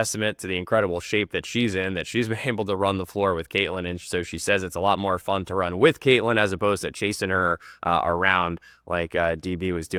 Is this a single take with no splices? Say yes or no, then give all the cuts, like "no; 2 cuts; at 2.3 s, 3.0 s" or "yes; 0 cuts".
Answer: yes; 0 cuts